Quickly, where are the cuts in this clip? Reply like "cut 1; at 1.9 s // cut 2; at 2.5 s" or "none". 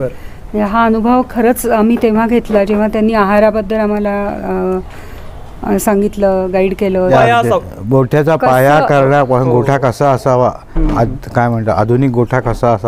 cut 1; at 7.1 s